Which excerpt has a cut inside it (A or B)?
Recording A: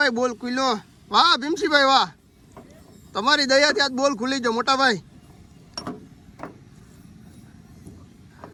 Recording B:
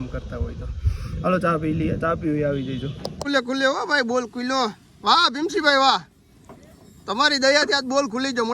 B